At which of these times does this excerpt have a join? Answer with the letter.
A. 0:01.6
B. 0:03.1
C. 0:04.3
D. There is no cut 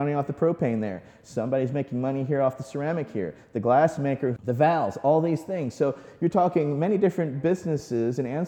C